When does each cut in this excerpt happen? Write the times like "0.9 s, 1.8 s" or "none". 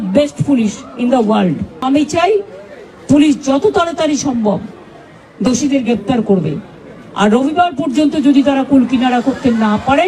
1.8 s